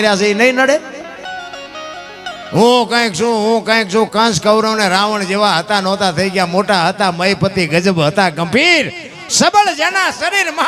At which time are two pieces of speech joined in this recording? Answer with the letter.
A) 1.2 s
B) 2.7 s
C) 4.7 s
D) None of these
A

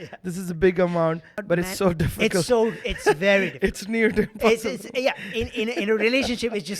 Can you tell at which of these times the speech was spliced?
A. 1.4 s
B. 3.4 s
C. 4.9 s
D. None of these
A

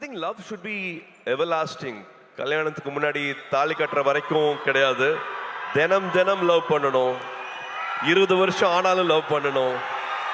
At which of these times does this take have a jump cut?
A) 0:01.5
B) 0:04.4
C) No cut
C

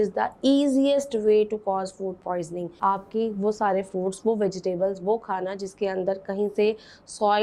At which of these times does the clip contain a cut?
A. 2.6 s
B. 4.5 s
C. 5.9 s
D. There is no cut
A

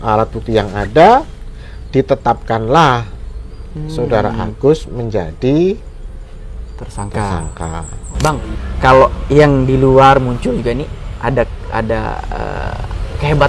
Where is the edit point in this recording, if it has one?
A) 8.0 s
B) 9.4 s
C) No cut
A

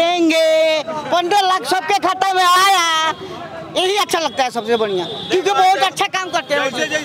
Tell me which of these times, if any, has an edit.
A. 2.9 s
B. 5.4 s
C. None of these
C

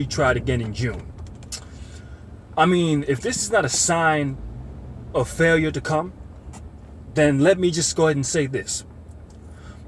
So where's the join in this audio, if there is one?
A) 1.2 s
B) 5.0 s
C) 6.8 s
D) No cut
B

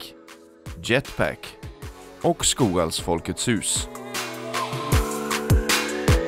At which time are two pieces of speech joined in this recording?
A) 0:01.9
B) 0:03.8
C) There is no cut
B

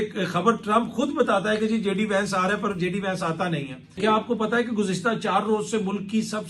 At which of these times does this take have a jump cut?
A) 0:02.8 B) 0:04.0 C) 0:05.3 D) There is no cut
B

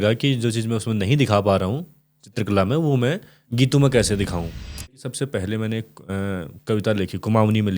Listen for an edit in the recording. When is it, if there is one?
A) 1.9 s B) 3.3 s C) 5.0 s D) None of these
C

